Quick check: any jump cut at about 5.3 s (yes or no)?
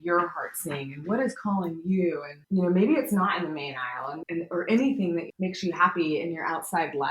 yes